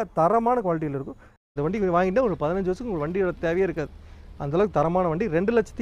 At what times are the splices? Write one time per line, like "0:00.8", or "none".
0:01.4